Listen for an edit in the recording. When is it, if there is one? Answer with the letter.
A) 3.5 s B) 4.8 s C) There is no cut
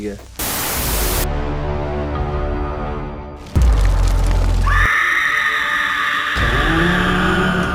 C